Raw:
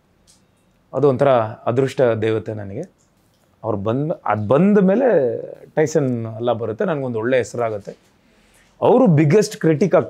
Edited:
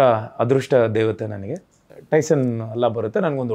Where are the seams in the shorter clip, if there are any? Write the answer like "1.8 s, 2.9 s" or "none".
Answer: 1.9 s